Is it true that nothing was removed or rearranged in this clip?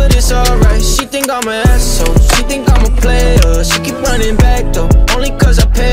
no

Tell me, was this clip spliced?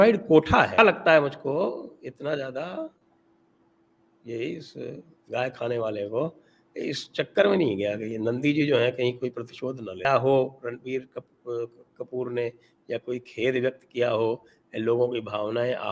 yes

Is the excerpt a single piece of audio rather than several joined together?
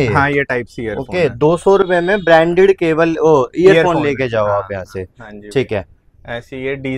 yes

